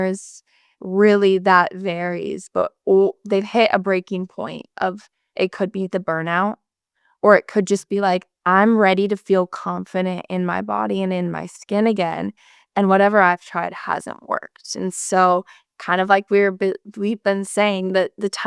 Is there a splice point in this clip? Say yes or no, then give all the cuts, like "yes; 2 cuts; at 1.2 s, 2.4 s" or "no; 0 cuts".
no; 0 cuts